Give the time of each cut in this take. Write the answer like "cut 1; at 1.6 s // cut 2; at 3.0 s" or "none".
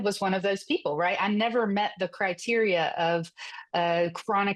none